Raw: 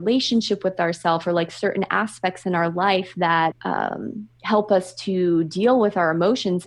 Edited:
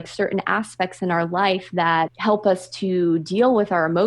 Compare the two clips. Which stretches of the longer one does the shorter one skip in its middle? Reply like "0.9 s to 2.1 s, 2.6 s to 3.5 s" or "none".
3.6 s to 4.4 s